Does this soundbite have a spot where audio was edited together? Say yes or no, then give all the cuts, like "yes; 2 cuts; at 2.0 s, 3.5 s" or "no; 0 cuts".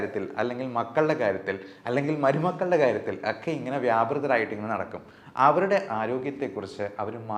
no; 0 cuts